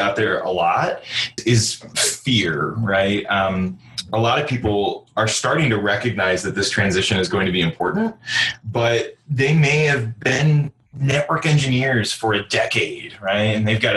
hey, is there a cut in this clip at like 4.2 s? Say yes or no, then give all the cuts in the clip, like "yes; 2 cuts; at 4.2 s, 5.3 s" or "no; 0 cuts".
no; 1 cut; at 1.4 s